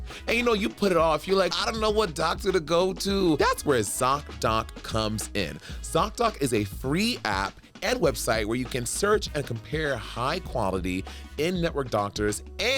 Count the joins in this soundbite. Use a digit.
2